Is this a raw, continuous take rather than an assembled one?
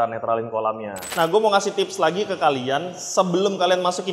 no; 1 cut; at 1.0 s

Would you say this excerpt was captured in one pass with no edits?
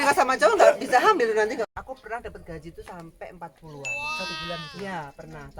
no; 1 cut; at 1.7 s

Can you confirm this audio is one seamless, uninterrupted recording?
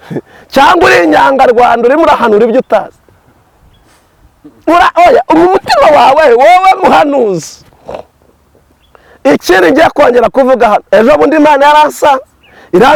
yes; 0 cuts

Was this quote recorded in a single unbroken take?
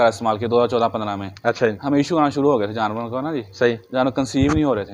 yes; 0 cuts

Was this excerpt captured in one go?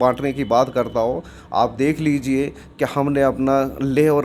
yes; 0 cuts

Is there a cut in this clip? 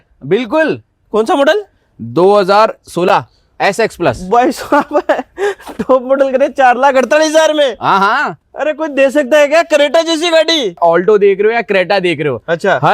yes; 1 cut; at 10.8 s

